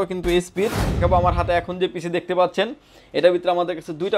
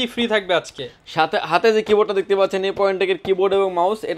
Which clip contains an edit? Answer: first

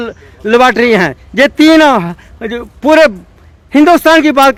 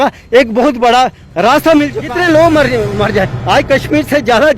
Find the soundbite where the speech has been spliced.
second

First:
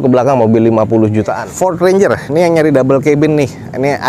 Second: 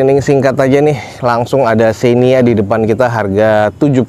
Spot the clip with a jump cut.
first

